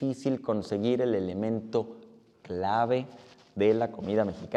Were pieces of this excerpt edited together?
no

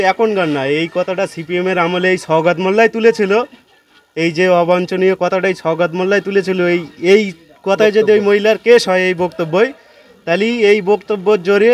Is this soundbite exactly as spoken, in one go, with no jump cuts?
yes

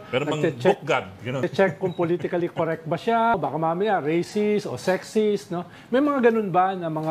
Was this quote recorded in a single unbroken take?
no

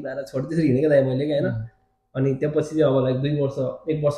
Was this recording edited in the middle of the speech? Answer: no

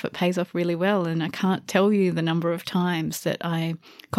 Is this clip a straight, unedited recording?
yes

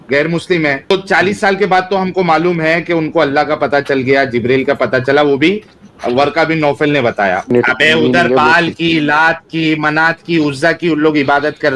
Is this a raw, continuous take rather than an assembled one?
no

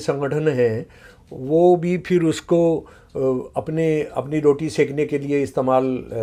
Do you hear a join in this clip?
no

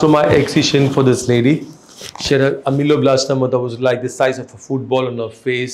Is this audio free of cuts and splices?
yes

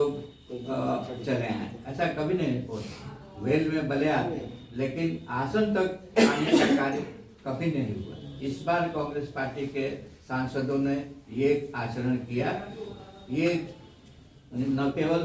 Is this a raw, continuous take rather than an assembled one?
yes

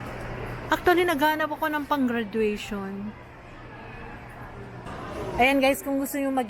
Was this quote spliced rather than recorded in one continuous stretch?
yes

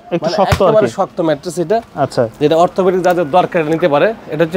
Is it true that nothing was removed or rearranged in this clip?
yes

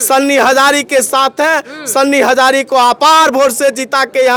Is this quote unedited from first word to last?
yes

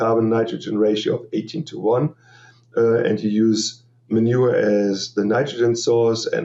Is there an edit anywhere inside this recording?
no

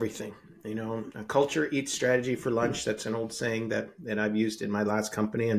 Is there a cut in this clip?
no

